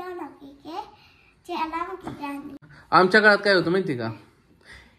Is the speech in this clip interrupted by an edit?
yes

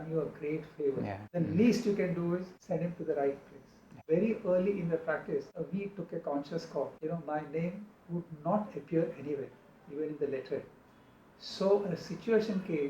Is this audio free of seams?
no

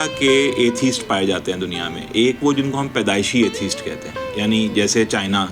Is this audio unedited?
yes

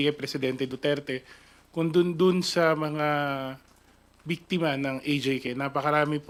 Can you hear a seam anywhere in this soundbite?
no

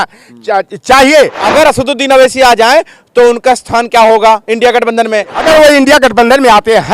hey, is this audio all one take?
no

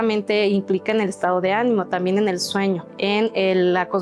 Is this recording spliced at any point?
no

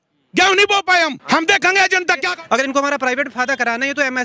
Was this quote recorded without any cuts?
no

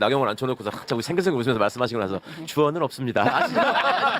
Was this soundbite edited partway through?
no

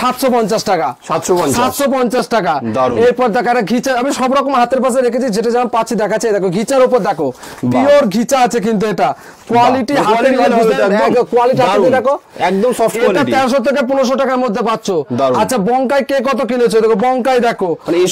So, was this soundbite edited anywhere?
no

